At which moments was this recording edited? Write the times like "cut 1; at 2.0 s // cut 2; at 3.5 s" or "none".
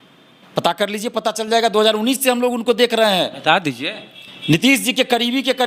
none